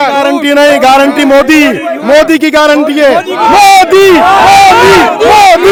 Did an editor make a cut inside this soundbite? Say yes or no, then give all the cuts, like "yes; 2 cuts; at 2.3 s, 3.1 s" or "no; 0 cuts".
no; 0 cuts